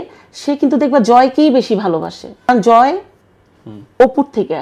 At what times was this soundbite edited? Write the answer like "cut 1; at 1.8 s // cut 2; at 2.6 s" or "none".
cut 1; at 2.3 s